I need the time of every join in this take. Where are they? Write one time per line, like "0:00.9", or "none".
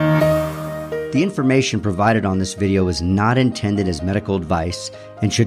0:01.0

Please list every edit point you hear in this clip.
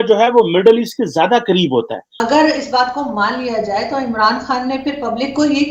0:02.1

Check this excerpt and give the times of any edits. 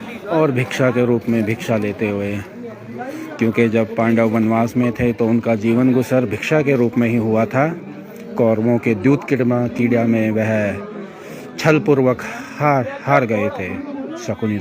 none

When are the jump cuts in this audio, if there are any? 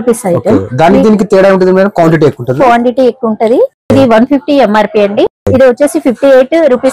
0:03.9
0:05.4

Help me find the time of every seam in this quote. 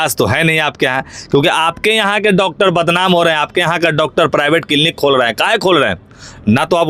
none

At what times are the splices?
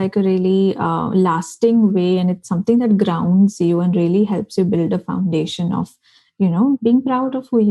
0:06.8

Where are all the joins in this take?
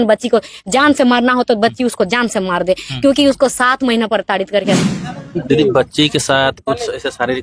0:04.8

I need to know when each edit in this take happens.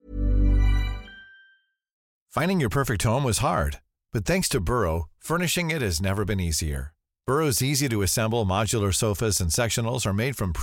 0:02.1

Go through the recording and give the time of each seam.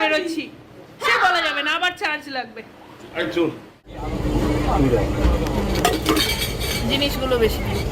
0:03.8

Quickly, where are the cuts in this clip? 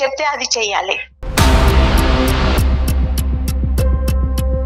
0:01.2

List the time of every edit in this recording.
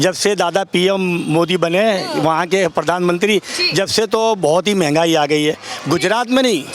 0:05.7

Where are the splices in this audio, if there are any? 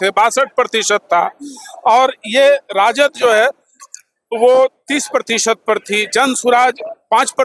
none

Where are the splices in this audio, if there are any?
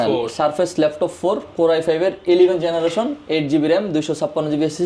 none

